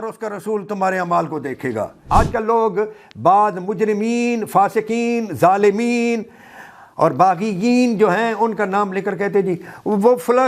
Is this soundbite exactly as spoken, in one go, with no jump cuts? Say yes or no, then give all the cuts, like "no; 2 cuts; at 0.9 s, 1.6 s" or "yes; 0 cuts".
no; 1 cut; at 2.0 s